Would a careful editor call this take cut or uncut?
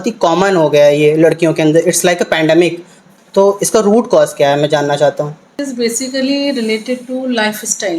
cut